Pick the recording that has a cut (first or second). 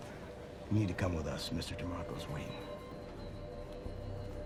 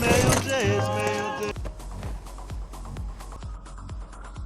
second